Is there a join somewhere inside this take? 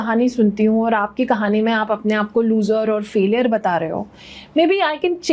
no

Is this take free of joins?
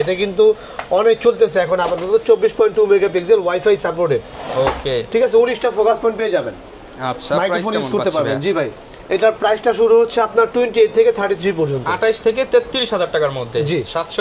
yes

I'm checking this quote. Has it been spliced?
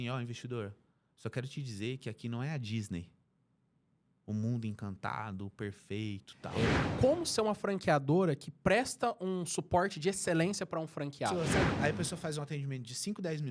yes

